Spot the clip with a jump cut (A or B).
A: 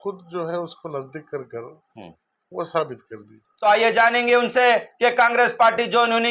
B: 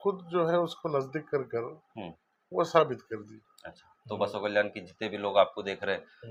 A